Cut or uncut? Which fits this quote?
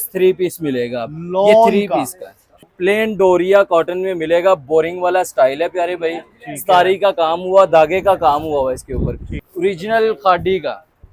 cut